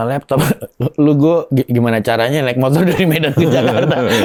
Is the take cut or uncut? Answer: uncut